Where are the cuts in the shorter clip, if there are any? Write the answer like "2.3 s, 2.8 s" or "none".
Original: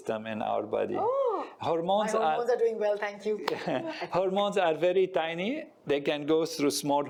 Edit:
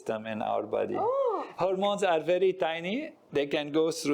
1.5 s

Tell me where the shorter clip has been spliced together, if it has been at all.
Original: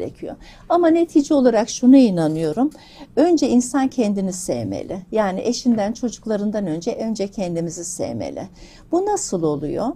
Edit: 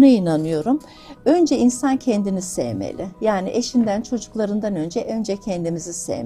none

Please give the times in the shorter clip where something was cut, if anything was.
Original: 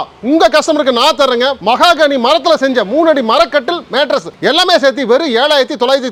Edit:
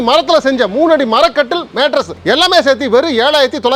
none

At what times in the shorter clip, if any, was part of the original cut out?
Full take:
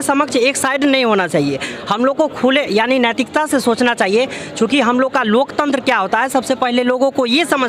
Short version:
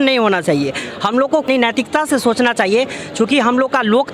1.5 s

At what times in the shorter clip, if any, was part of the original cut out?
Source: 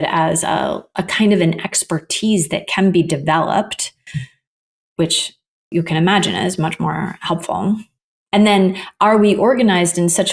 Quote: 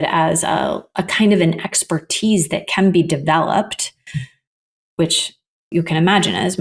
none

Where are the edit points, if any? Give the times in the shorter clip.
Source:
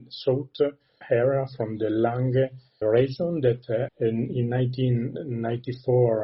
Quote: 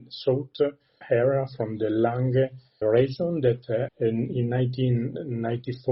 none

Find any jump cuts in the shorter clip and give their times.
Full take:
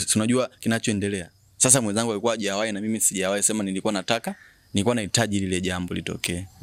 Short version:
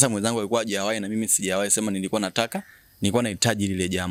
none

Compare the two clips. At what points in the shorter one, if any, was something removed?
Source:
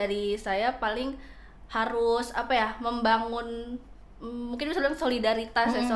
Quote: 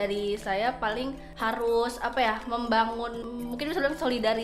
1.3 s, 3.2 s

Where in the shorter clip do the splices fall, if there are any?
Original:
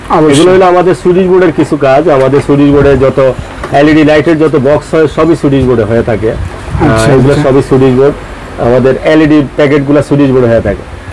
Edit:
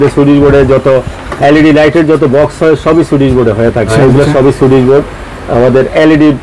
3.9 s

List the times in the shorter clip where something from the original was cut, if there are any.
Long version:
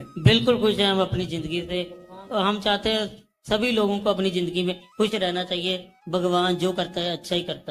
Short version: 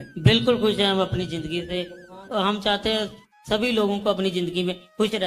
none

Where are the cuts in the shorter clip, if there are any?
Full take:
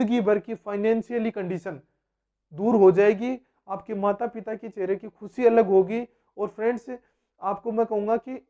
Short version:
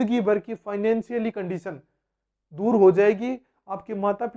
none

